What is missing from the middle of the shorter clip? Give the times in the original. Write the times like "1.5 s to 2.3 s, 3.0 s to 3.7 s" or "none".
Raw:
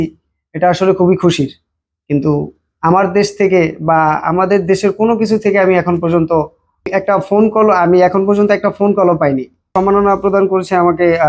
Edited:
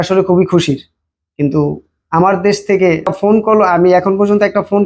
3.8 s to 7.2 s